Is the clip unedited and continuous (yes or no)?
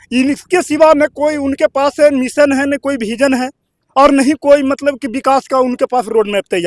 yes